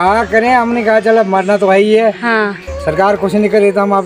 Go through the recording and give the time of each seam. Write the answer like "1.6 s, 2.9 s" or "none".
none